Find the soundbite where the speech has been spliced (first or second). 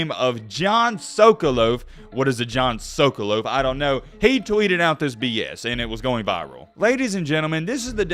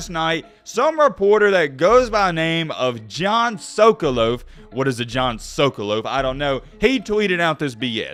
first